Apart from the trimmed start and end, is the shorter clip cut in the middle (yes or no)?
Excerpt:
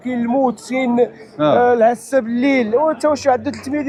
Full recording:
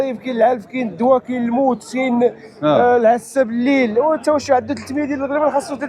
no